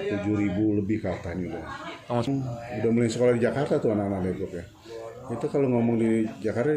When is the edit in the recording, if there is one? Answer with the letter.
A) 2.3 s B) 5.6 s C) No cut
A